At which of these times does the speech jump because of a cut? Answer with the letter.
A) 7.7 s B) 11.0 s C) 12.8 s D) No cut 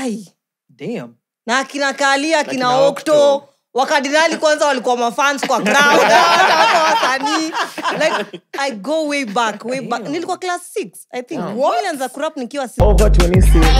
C